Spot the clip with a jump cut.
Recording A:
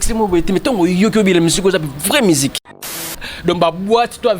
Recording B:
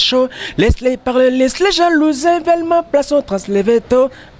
A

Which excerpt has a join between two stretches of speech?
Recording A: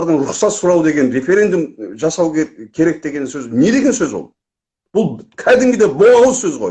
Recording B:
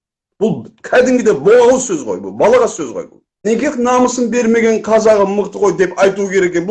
B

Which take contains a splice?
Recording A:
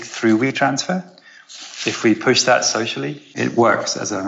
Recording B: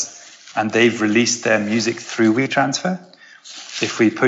A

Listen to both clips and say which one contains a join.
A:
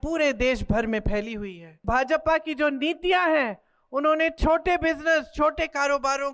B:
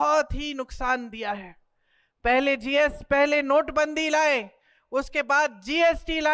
A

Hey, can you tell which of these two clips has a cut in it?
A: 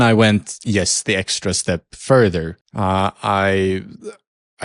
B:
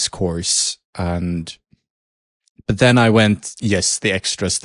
A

